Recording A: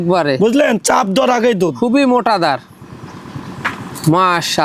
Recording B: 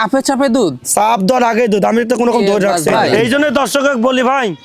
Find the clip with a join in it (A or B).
B